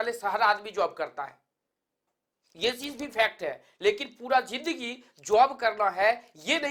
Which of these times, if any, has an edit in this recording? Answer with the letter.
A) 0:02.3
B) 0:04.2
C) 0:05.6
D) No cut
D